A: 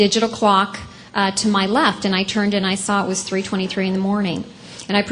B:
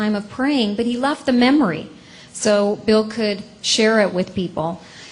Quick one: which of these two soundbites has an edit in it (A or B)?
A